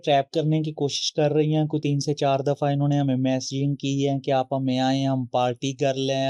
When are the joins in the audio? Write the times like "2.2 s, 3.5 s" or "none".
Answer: none

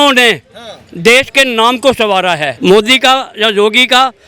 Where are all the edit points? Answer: 2.5 s

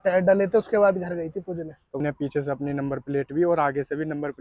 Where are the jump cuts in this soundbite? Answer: 2.0 s

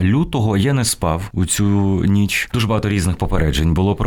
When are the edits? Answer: 1.3 s, 2.4 s

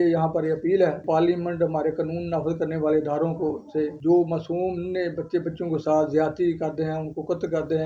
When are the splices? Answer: 1.0 s, 4.0 s

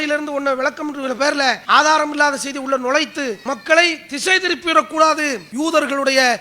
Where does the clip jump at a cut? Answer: 1.6 s, 3.4 s, 5.4 s

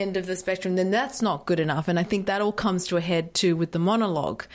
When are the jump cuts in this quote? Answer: none

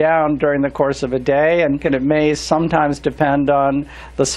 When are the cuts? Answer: 1.8 s

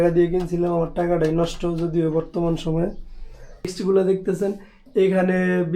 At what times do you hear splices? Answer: 3.7 s

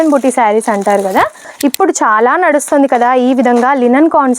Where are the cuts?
1.5 s

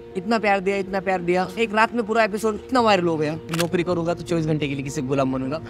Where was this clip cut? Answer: 1.5 s, 2.7 s, 3.5 s

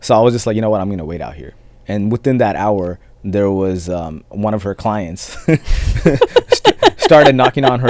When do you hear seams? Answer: 1.7 s, 4.3 s

